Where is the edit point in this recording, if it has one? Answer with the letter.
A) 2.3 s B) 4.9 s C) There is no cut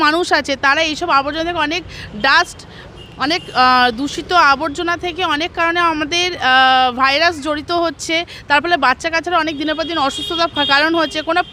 C